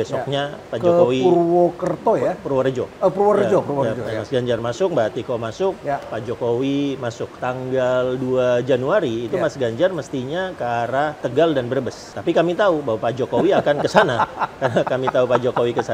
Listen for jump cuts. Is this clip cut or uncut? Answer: cut